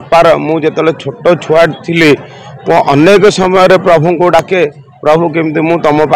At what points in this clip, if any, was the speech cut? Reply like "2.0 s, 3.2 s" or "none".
none